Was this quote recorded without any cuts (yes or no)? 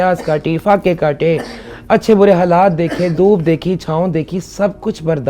yes